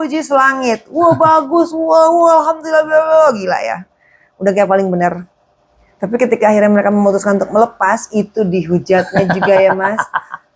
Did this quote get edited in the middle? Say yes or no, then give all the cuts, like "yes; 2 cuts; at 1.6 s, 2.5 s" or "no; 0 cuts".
no; 0 cuts